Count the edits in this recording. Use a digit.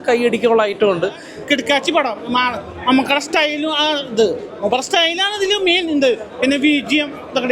1